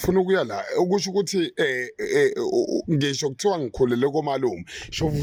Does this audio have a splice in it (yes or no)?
no